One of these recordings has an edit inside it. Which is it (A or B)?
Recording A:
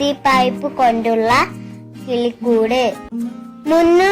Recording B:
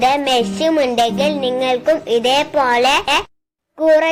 A